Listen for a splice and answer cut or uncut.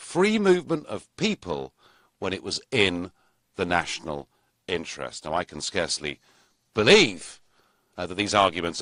uncut